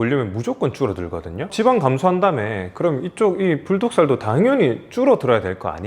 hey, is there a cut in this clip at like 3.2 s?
no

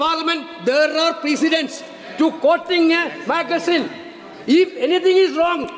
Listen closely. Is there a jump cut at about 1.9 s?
no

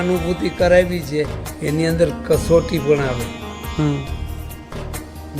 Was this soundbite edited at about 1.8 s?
yes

